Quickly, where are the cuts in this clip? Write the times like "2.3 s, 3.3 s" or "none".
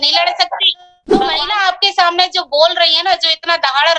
1.2 s